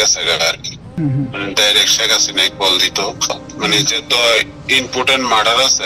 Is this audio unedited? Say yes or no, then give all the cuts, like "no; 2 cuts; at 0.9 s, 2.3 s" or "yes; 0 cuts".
no; 2 cuts; at 1.0 s, 3.4 s